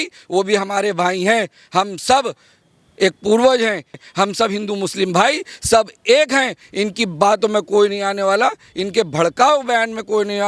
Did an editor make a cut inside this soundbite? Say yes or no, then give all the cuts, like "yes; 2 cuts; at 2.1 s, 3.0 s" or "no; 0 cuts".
yes; 2 cuts; at 4.0 s, 6.6 s